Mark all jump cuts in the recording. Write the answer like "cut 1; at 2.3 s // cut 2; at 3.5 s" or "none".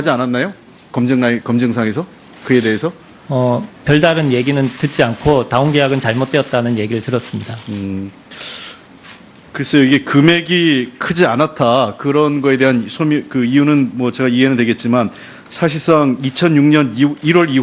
cut 1; at 5.5 s